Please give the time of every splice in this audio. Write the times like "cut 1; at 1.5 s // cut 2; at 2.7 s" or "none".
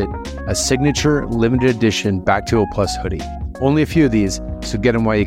none